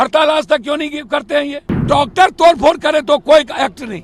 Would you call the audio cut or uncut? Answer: cut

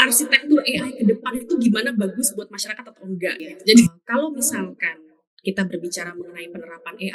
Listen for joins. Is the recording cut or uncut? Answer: cut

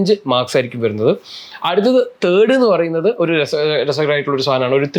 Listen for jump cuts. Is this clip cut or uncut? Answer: uncut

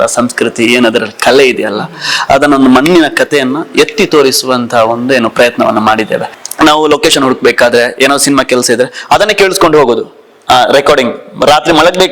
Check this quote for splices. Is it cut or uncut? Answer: cut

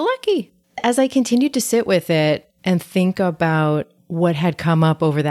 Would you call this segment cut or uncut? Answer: cut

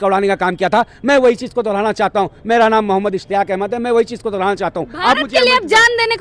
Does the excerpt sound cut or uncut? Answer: uncut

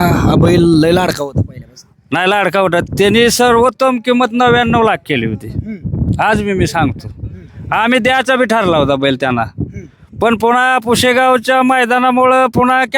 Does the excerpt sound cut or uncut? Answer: uncut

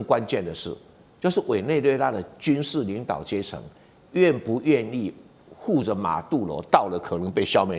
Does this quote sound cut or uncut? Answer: uncut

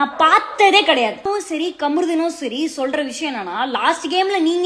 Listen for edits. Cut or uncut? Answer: uncut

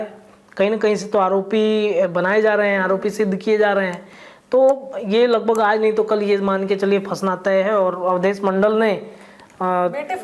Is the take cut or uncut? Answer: uncut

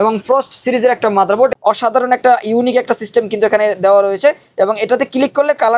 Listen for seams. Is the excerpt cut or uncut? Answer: cut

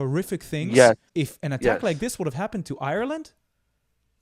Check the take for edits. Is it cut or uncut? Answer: cut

